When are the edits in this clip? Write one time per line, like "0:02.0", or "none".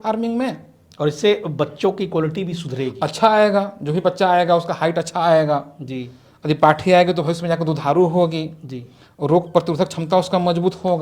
none